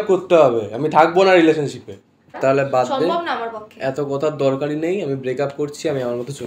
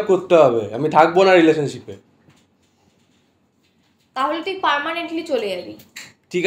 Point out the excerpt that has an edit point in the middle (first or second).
first